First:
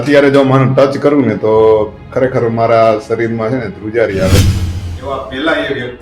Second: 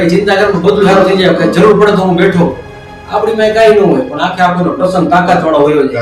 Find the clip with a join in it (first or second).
first